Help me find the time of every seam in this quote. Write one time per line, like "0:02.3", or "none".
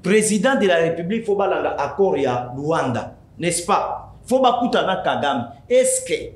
none